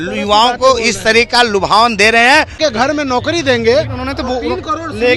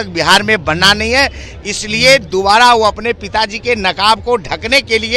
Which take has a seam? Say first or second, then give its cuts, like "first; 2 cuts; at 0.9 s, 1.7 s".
first; 1 cut; at 2.5 s